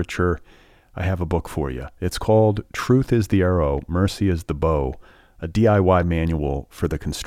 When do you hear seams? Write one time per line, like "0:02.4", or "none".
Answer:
none